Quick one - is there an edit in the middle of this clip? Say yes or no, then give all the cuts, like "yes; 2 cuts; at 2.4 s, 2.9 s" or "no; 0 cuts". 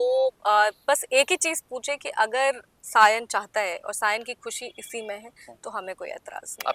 no; 0 cuts